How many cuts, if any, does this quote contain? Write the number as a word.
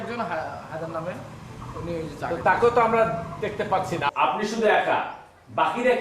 one